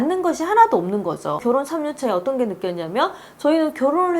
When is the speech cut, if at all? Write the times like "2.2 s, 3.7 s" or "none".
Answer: 1.4 s